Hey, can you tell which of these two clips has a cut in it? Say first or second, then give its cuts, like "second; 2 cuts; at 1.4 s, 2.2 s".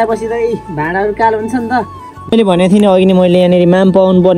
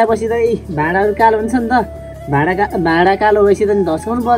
first; 1 cut; at 2.3 s